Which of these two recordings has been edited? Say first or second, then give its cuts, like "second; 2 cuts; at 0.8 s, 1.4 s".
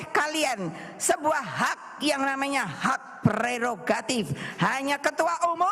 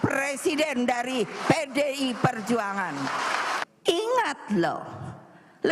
second; 1 cut; at 3.6 s